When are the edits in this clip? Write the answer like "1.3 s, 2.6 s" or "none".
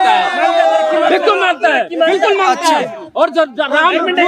none